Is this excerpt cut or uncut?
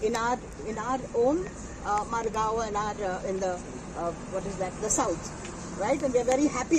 uncut